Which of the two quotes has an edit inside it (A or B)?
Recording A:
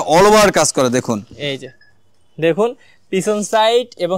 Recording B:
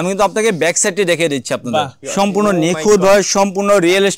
B